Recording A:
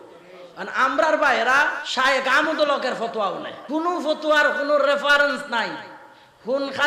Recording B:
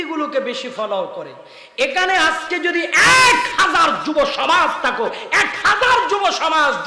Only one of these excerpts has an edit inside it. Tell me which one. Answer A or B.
A